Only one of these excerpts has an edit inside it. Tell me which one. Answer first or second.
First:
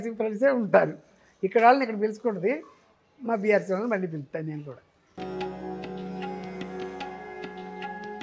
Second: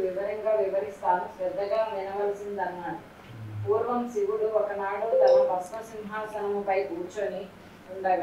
first